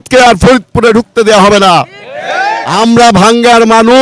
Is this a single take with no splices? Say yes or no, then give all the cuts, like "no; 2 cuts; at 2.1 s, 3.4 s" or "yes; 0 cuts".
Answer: no; 1 cut; at 2.6 s